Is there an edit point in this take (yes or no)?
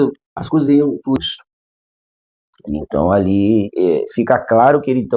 yes